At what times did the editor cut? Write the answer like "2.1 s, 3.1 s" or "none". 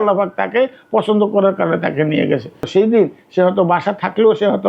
2.7 s